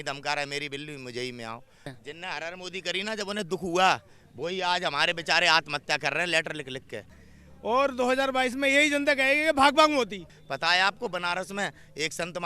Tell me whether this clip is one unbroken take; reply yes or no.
no